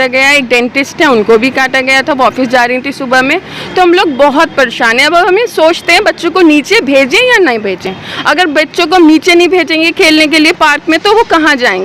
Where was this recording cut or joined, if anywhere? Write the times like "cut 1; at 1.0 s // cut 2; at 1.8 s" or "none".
none